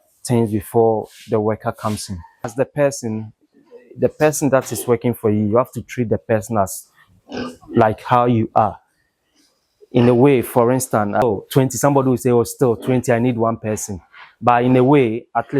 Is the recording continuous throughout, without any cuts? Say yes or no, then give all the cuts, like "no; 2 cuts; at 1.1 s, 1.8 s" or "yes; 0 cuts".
no; 2 cuts; at 2.5 s, 11.2 s